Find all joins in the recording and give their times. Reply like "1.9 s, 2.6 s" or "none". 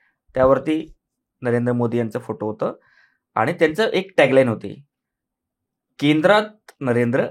none